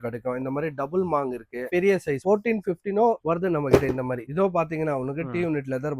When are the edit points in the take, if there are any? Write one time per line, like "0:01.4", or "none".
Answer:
0:01.7
0:04.2